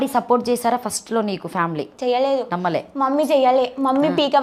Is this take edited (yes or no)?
yes